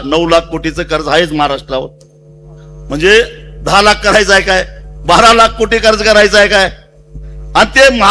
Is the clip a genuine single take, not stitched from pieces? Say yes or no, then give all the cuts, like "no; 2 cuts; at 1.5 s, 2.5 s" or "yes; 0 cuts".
yes; 0 cuts